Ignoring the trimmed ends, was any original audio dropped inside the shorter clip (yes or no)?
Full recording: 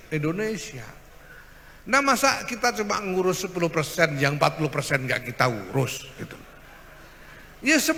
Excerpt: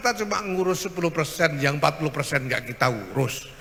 no